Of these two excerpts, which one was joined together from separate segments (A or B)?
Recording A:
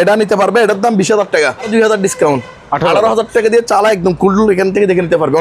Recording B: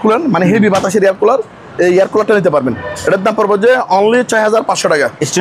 A